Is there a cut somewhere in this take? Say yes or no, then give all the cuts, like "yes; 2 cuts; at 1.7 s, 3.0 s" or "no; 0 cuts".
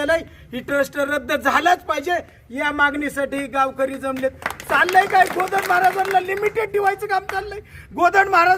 no; 0 cuts